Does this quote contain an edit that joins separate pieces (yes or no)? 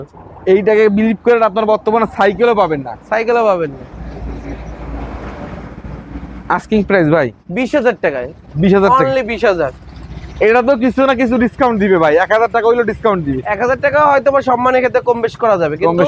no